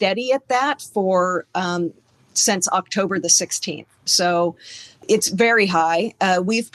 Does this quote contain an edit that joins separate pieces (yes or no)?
yes